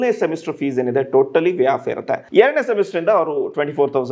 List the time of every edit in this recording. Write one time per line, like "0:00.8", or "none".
0:02.2